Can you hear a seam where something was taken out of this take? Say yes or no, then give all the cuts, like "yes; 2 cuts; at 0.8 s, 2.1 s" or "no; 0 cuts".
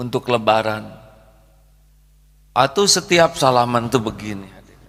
no; 0 cuts